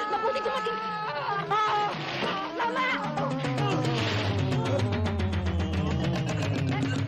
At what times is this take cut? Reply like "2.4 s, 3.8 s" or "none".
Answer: none